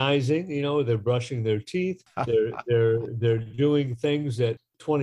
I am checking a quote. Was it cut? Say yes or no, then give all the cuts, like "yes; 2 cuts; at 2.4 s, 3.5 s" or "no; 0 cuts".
yes; 1 cut; at 2.1 s